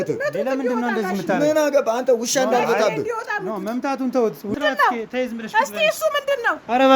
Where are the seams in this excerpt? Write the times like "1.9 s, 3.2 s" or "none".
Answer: 4.5 s